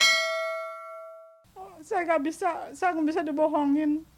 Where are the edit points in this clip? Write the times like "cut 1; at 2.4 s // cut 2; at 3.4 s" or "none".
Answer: cut 1; at 1.2 s

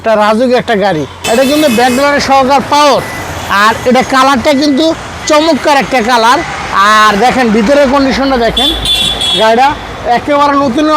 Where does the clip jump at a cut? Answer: cut 1; at 1.4 s

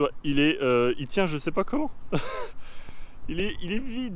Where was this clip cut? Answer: none

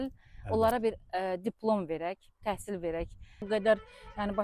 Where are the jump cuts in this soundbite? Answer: cut 1; at 3.4 s

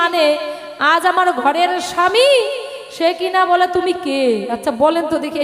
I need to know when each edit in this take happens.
none

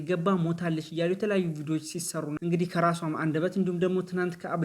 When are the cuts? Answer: cut 1; at 2.3 s

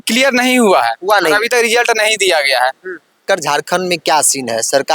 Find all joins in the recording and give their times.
cut 1; at 3.2 s

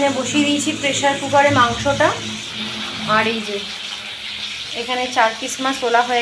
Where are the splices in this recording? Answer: none

